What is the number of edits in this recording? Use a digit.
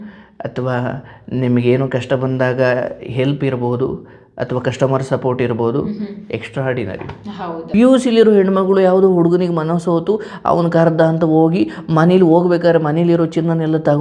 1